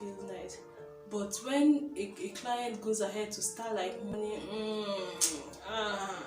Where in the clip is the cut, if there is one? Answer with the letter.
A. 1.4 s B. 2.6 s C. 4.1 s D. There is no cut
C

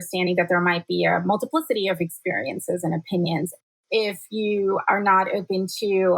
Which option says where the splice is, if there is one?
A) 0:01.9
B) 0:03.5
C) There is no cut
B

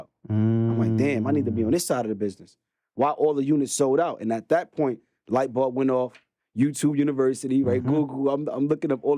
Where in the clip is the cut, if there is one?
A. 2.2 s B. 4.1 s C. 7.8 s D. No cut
D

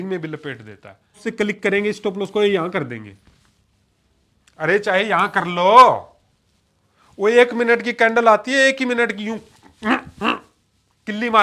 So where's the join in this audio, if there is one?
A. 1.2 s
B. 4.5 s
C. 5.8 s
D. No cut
A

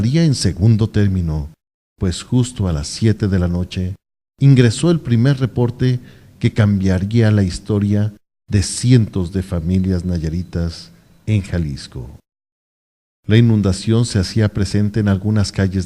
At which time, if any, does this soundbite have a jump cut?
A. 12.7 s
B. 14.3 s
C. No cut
B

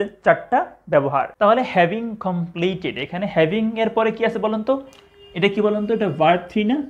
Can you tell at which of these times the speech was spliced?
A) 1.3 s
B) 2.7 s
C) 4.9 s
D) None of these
A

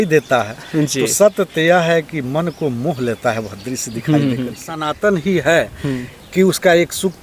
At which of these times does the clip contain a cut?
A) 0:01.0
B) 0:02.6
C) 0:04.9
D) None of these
C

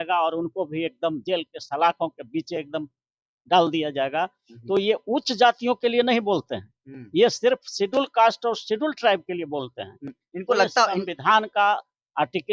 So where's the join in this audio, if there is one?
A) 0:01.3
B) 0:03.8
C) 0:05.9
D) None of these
D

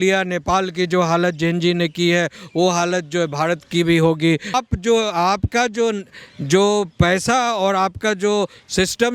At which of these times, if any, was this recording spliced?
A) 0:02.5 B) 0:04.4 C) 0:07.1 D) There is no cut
D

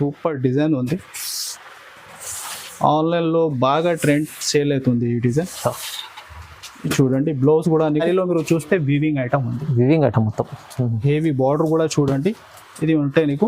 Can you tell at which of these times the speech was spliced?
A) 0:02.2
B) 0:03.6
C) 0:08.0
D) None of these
C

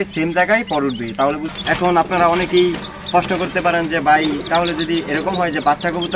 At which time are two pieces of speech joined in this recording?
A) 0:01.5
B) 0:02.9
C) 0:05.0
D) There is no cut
A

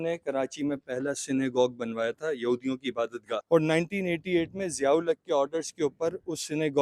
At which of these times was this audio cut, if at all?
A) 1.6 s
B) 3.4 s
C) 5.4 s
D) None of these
B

